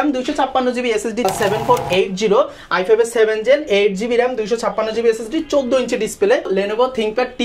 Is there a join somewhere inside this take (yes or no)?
yes